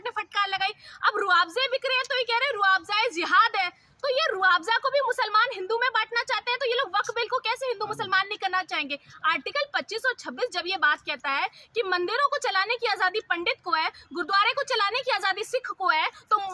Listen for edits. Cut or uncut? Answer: uncut